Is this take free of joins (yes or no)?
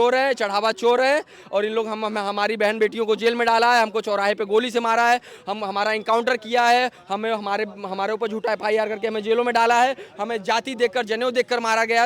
yes